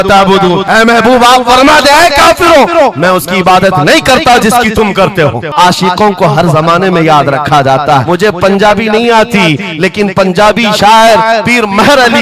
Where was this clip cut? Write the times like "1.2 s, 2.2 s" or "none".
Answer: 5.5 s, 8.0 s

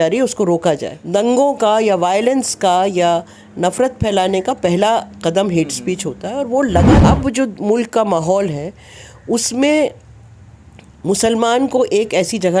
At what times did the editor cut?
0.9 s, 7.0 s

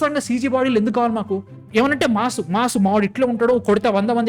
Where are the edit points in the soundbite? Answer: 1.5 s

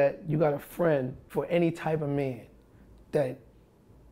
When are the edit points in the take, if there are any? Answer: 1.3 s

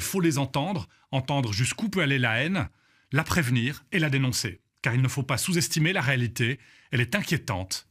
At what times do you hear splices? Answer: none

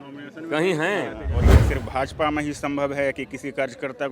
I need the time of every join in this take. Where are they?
1.4 s

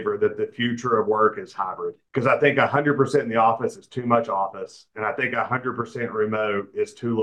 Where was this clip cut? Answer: 1.9 s

